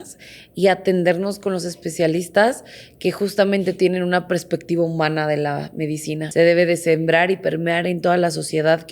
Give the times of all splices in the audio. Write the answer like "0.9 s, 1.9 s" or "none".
6.2 s